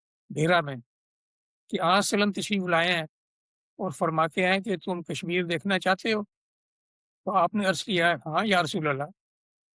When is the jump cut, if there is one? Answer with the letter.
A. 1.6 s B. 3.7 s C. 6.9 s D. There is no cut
D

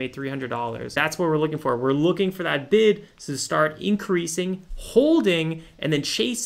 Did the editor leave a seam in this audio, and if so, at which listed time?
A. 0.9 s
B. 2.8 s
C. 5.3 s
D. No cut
A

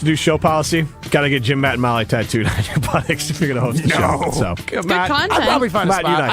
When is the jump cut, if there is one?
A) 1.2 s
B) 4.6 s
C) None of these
B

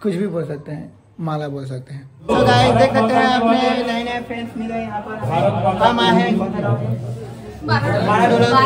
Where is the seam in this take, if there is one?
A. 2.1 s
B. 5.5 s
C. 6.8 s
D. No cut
A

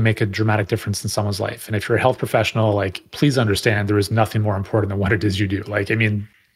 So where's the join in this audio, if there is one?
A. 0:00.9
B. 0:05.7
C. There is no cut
C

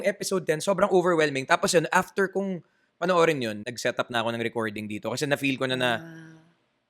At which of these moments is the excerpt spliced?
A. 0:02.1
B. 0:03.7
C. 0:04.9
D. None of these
B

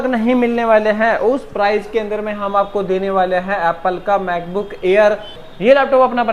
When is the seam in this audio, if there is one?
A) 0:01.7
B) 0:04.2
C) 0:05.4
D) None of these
C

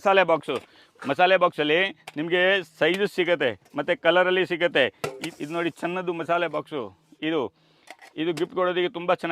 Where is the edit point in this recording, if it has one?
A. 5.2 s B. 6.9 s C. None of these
A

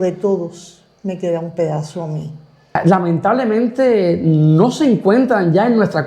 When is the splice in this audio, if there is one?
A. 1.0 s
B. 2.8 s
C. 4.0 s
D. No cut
B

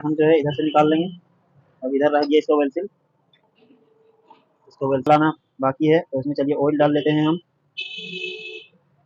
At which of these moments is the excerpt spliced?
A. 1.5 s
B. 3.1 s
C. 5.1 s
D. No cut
C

